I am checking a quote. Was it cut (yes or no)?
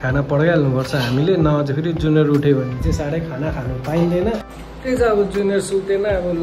yes